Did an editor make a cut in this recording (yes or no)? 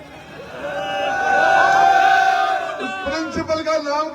no